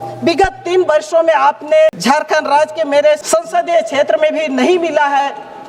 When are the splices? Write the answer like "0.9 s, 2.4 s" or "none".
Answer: 2.0 s, 3.2 s